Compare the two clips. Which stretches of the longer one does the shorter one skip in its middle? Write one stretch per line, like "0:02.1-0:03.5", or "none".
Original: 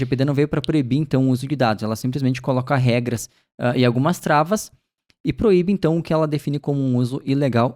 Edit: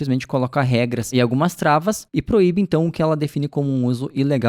0:03.3-0:03.8
0:04.7-0:05.1

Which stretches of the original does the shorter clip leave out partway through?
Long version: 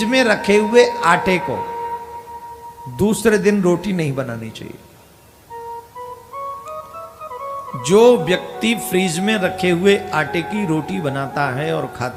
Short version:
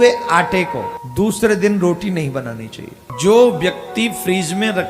0:01.7-0:02.8
0:04.8-0:07.7

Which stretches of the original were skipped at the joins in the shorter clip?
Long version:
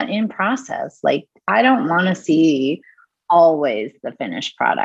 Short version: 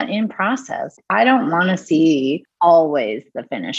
0:00.9-0:01.3
0:02.8-0:03.1

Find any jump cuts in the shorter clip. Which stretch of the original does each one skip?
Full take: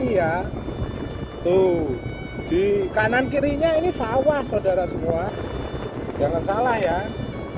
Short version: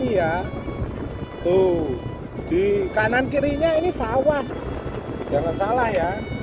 0:04.5-0:05.4

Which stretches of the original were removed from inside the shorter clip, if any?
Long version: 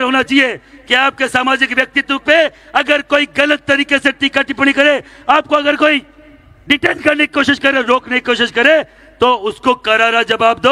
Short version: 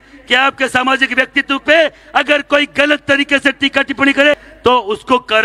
0:05.1-0:09.0

